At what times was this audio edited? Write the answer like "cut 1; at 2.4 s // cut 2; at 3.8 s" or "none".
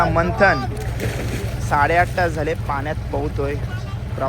none